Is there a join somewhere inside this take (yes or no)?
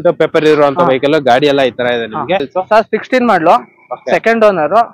yes